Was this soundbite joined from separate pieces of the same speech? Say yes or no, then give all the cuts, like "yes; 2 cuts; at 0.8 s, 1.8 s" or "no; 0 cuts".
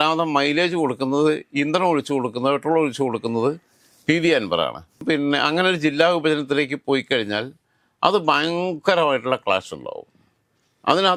no; 0 cuts